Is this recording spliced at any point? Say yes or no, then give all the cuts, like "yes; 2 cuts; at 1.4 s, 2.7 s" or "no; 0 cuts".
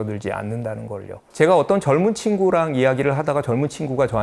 yes; 1 cut; at 1.2 s